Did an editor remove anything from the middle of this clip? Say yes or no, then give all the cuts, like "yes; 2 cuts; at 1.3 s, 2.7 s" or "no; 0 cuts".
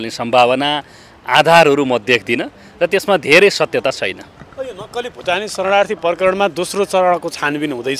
no; 0 cuts